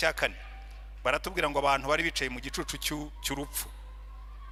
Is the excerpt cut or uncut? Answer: uncut